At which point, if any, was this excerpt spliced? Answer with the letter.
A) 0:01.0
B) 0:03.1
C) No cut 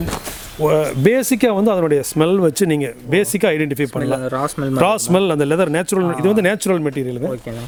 C